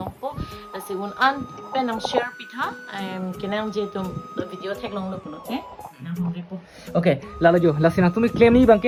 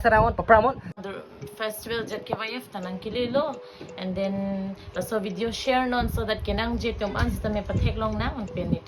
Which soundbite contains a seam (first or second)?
second